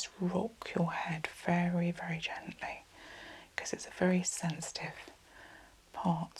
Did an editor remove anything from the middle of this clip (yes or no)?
no